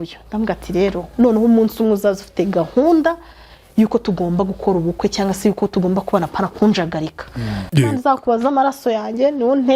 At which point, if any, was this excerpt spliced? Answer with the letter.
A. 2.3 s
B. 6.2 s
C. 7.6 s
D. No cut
C